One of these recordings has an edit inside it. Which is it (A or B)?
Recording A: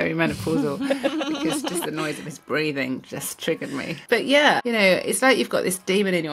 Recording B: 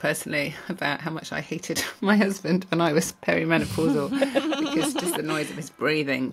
A